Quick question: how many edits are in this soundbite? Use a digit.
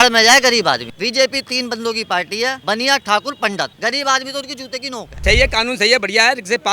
4